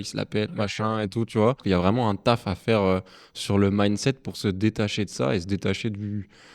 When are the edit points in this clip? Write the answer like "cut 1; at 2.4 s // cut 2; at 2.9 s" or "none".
cut 1; at 1.6 s